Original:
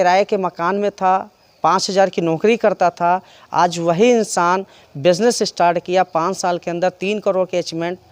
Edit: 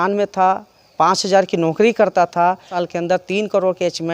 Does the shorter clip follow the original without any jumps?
no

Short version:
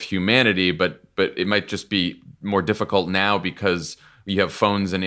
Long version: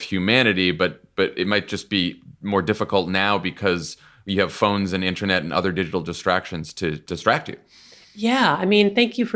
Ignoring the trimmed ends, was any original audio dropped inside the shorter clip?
no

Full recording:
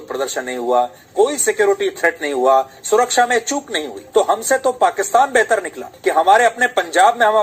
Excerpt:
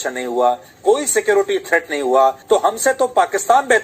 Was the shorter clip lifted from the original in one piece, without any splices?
no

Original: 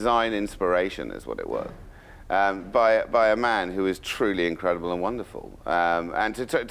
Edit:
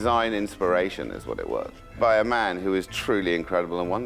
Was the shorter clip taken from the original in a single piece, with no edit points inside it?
no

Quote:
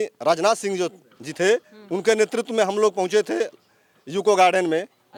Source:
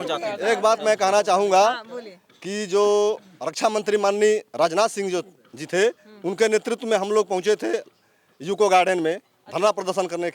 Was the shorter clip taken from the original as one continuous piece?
yes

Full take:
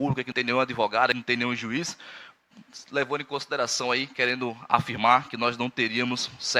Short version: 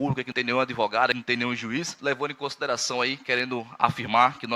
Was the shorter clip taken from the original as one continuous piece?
no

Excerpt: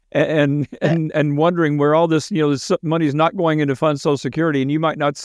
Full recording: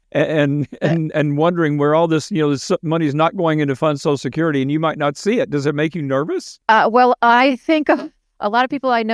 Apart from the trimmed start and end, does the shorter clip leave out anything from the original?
no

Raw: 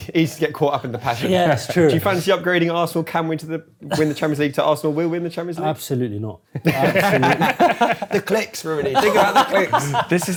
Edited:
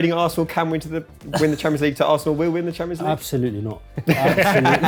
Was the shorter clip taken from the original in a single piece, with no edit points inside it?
yes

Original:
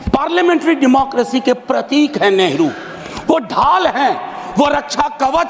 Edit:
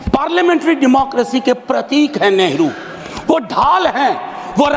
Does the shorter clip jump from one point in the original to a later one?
no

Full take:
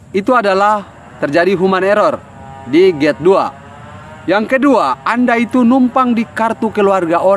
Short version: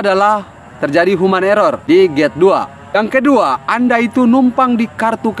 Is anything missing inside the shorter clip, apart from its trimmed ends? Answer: yes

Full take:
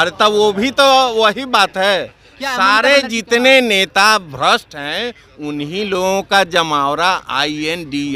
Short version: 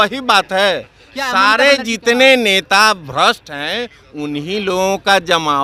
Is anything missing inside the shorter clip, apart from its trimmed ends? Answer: no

